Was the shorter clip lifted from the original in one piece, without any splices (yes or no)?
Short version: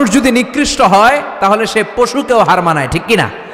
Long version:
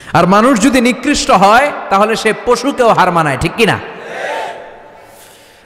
yes